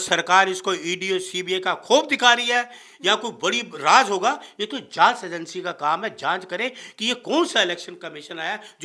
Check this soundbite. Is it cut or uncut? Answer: uncut